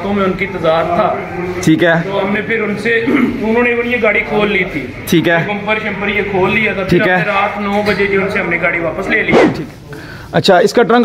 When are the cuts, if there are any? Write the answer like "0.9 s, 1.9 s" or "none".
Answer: 9.5 s